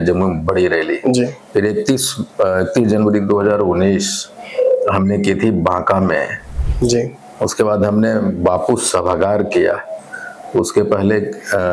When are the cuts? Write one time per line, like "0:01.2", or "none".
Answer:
none